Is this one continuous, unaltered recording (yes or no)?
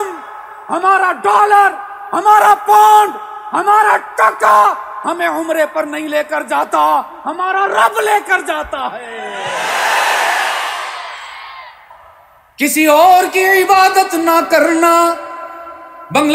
no